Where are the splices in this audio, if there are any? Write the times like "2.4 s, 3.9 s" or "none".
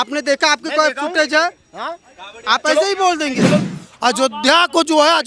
3.6 s